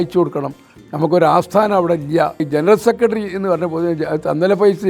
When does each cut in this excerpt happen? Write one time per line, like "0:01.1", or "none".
0:02.5

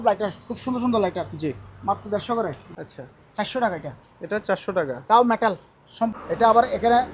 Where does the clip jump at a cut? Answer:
0:02.6
0:06.1

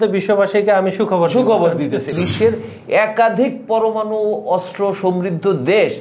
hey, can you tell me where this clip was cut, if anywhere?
0:02.1

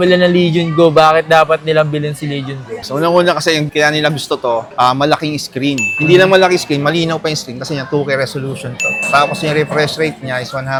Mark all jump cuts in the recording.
none

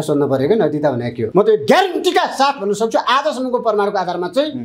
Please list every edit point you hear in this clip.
0:01.2

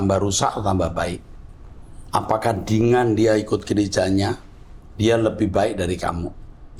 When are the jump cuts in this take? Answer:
none

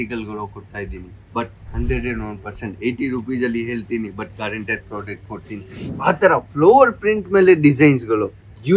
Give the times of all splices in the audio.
0:05.8

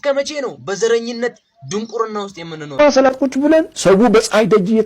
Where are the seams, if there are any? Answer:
0:02.7

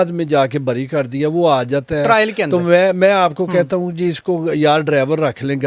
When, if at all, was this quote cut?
none

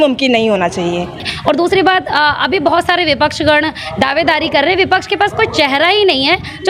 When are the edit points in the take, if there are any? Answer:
0:01.2

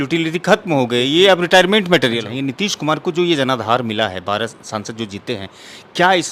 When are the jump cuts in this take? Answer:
0:02.3

